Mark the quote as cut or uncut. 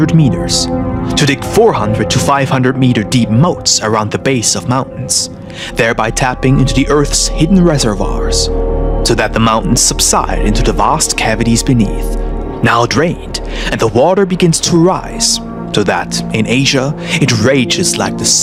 uncut